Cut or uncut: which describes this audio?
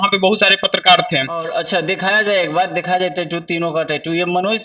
cut